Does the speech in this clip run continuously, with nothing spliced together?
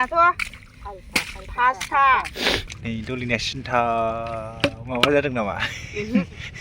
no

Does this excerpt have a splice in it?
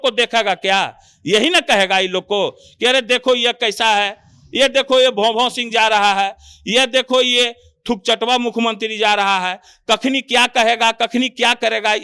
no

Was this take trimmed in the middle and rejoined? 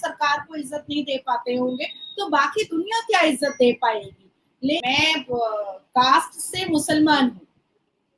yes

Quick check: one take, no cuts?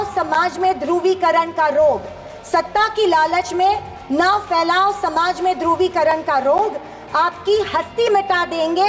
yes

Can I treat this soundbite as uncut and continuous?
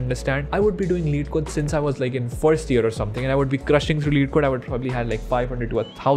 yes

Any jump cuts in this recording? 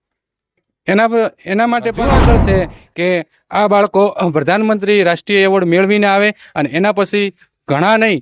yes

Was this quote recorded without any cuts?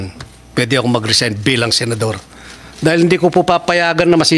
yes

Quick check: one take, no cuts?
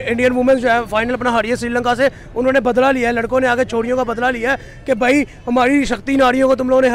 yes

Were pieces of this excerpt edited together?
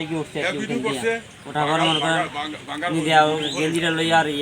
no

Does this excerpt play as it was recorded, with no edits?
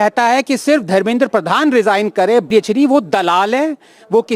no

